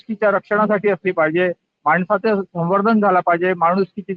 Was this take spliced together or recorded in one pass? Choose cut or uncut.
uncut